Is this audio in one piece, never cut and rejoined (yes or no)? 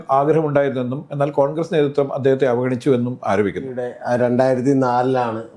no